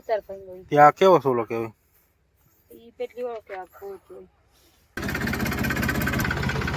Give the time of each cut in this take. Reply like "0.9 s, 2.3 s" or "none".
5.0 s